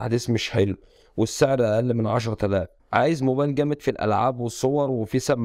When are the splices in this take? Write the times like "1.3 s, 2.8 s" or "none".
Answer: 2.8 s